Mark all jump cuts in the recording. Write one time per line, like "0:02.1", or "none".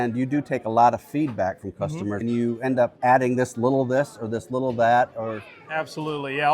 0:02.2
0:02.9